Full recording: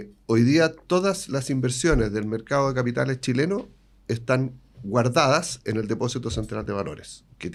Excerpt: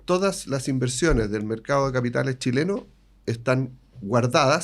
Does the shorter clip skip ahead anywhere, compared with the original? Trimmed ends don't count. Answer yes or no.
no